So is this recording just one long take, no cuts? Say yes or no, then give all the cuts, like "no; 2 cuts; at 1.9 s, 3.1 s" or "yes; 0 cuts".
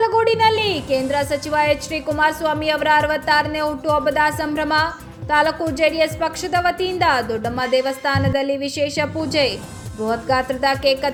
yes; 0 cuts